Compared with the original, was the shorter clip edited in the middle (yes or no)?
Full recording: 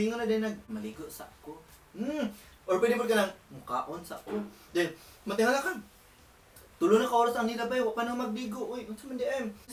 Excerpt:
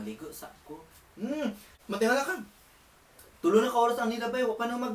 yes